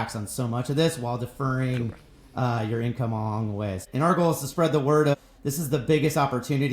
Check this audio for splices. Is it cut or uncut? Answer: cut